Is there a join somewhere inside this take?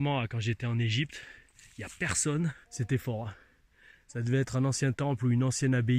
yes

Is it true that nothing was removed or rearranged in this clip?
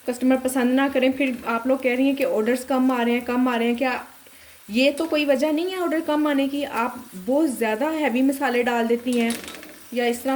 yes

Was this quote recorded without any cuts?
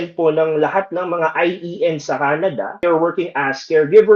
no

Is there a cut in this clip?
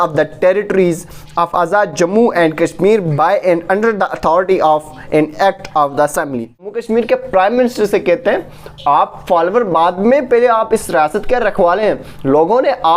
yes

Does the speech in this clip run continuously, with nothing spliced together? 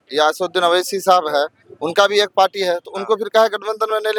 yes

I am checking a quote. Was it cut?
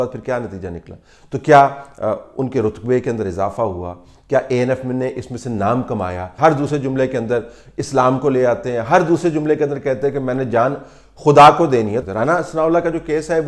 yes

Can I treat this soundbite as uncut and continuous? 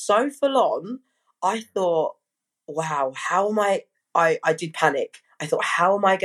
yes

